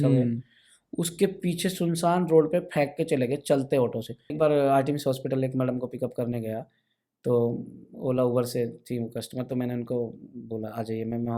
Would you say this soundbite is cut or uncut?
cut